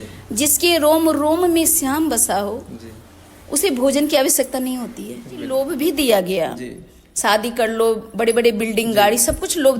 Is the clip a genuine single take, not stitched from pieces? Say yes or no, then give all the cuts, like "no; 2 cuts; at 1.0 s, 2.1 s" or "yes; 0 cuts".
no; 1 cut; at 5.4 s